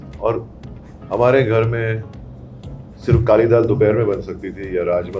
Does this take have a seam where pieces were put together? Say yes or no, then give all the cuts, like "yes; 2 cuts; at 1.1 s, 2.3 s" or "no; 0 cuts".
no; 0 cuts